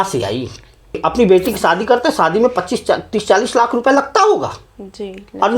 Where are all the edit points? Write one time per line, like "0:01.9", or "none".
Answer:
0:01.0